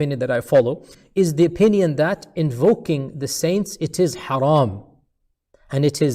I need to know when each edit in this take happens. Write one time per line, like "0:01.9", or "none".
0:00.9

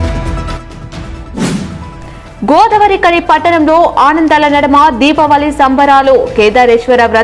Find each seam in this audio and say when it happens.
none

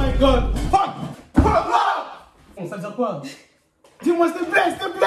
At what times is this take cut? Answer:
0:01.1
0:02.5

